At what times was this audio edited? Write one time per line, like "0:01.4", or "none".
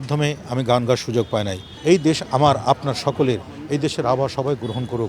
0:01.7